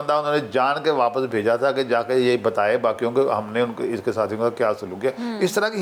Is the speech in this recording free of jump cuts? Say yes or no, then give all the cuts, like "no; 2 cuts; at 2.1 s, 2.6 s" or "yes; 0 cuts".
yes; 0 cuts